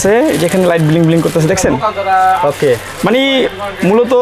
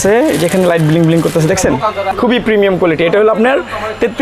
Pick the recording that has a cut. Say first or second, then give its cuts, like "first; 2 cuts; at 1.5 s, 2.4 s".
second; 1 cut; at 2.1 s